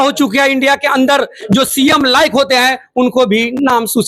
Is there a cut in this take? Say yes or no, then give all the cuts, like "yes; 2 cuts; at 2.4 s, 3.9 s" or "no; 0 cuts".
no; 0 cuts